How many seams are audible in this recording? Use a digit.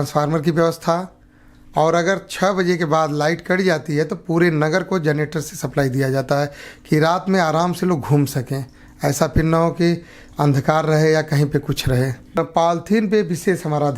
1